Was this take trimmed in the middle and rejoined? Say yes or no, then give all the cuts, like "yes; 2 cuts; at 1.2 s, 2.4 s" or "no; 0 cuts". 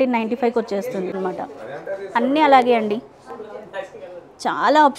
yes; 1 cut; at 1.2 s